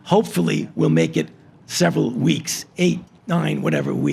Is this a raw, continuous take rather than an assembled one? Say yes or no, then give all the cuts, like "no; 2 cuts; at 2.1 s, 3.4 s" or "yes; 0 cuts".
yes; 0 cuts